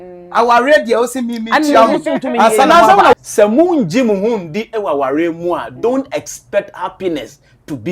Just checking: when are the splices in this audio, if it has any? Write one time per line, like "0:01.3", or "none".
0:03.1